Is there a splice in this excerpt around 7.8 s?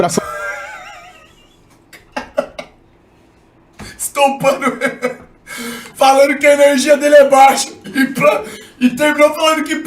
yes; 1 cut; at 7.8 s

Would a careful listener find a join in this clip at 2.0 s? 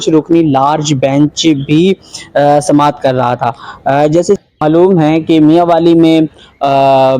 no; 1 cut; at 4.4 s

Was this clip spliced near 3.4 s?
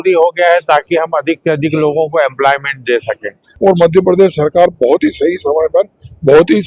yes; 1 cut; at 3.4 s

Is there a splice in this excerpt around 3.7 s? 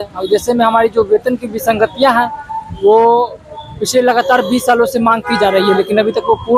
no; 0 cuts

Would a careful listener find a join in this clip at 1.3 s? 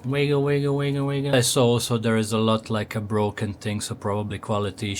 yes; 1 cut; at 1.3 s

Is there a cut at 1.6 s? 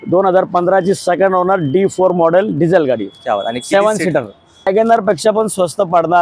no; 1 cut; at 4.7 s

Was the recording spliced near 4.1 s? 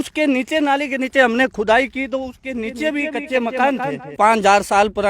yes; 1 cut; at 4.1 s

